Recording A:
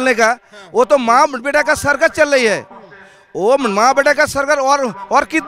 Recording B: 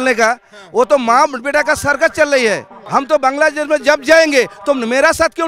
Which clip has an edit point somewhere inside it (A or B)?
B